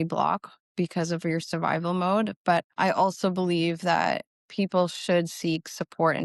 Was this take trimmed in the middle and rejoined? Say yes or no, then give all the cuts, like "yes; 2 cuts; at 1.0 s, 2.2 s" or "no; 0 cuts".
no; 0 cuts